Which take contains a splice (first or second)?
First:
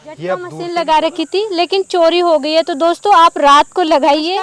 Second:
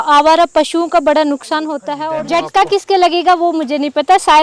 second